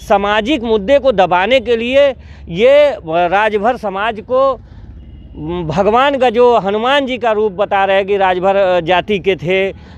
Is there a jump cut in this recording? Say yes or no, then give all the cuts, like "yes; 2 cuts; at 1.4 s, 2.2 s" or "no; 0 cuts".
no; 0 cuts